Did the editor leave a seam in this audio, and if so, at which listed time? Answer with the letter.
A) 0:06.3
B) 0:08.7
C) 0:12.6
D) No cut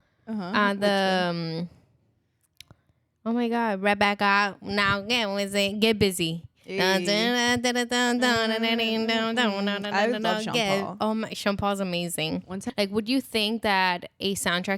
C